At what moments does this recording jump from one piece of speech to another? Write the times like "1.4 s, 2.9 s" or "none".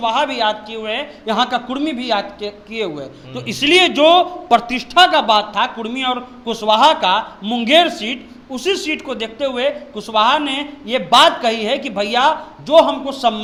none

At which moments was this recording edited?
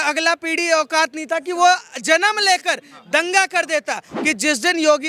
4.1 s

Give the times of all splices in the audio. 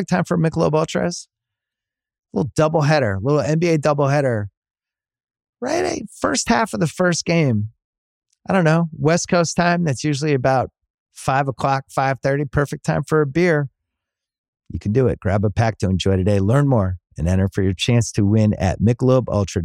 none

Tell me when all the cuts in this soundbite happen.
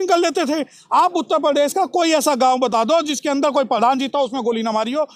none

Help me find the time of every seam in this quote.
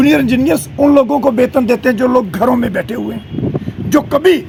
none

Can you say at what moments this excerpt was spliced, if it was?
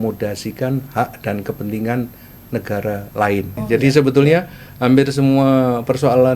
3.6 s

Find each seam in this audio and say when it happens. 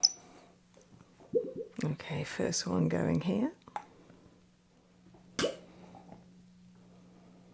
none

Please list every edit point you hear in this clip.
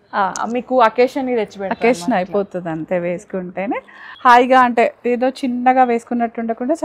4.0 s

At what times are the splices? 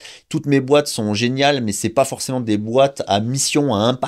none

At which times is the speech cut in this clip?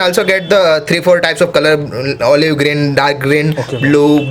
none

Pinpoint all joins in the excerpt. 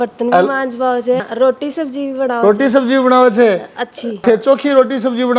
1.2 s, 4.2 s

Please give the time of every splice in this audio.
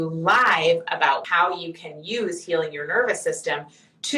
1.2 s

